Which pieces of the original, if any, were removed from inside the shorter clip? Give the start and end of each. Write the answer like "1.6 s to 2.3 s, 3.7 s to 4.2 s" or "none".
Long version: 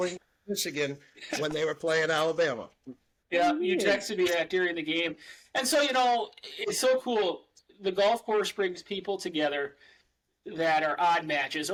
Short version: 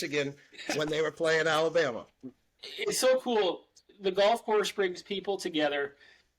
3.2 s to 6.3 s